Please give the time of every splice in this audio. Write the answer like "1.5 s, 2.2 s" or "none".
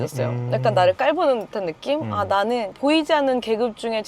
none